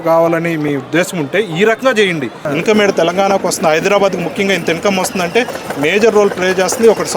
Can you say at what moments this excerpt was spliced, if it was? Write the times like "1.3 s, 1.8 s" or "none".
2.4 s